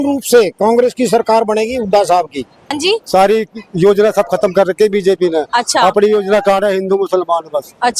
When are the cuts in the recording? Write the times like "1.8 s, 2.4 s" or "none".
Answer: 2.8 s